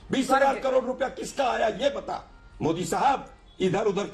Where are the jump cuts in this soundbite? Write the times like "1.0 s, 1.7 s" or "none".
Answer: none